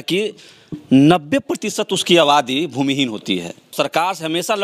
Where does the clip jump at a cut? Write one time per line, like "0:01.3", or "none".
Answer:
0:03.7